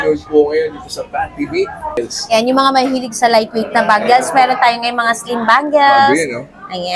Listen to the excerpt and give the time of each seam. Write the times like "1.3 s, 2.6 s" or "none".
2.0 s